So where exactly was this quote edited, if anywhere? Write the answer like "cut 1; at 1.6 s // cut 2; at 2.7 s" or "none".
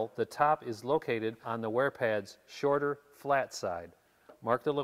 cut 1; at 1.4 s

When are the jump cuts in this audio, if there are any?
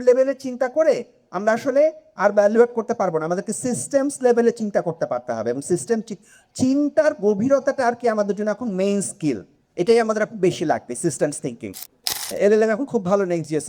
cut 1; at 12.1 s

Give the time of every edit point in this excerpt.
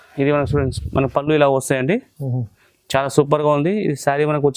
none

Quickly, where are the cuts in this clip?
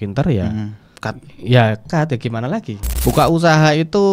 cut 1; at 2.8 s

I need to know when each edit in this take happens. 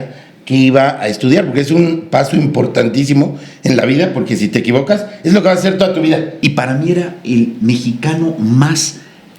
cut 1; at 6.3 s

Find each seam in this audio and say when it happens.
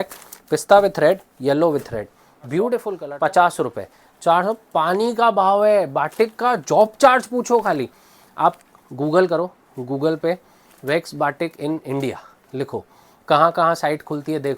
cut 1; at 3.0 s

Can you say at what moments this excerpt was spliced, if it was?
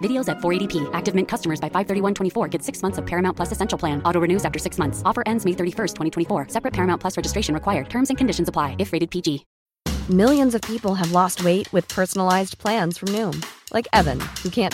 cut 1; at 9.5 s

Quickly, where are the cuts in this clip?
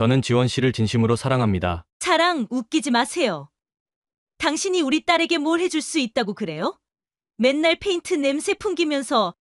cut 1; at 1.9 s

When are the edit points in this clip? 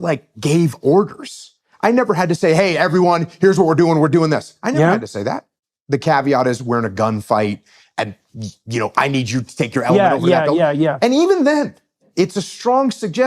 cut 1; at 5.5 s // cut 2; at 12.0 s

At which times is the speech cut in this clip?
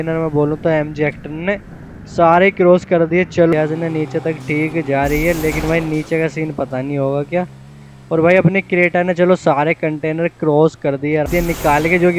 cut 1; at 3.5 s // cut 2; at 11.3 s

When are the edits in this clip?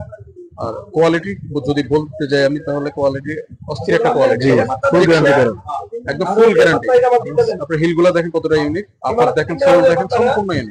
none

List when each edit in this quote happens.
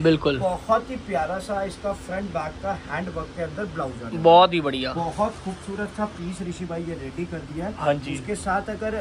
none

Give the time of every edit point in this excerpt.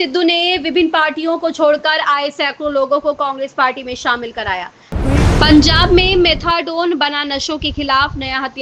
cut 1; at 4.8 s

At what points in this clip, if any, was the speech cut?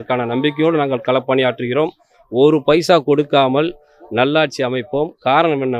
none

